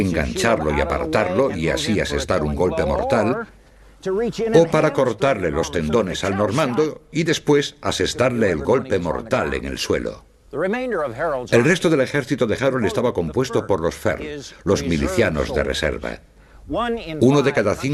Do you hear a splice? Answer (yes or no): yes